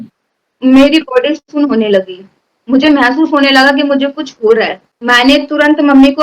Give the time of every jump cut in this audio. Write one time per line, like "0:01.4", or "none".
none